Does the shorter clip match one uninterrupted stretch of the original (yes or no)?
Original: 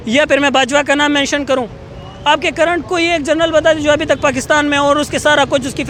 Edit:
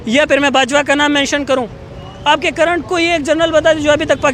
yes